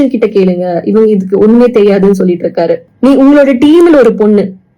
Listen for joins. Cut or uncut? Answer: cut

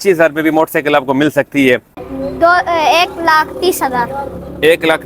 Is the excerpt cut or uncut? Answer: cut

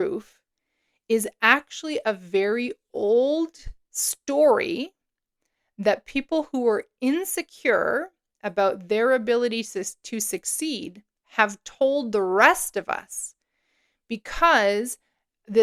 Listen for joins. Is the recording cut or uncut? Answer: uncut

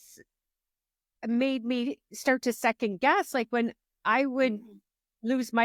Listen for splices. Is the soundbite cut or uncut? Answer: uncut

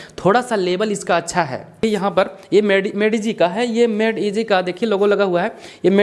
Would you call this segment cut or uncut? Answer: cut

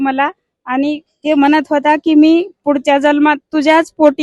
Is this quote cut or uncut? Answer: uncut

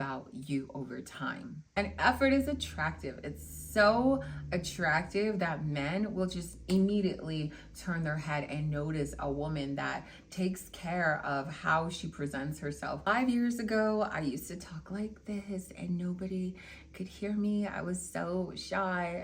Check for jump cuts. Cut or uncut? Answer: cut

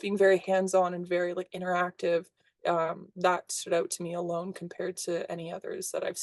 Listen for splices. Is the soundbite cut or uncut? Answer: uncut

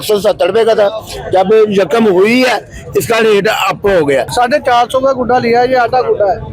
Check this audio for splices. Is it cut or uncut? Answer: cut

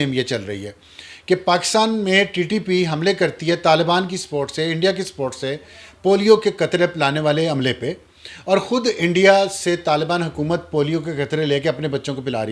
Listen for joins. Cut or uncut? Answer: uncut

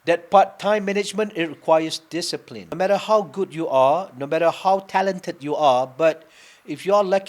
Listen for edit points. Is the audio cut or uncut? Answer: cut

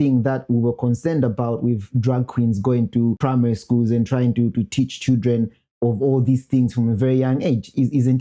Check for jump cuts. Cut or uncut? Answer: cut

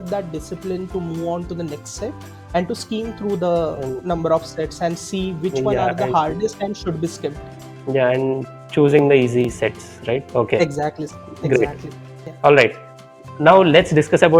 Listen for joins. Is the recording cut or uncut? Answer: uncut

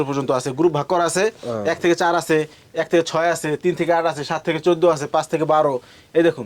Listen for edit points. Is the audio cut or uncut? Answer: uncut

